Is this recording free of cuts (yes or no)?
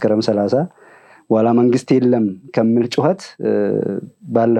yes